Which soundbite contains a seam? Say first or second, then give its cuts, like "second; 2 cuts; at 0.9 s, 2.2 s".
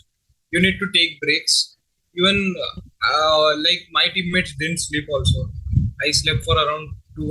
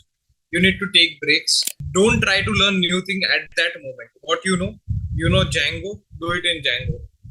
second; 1 cut; at 1.8 s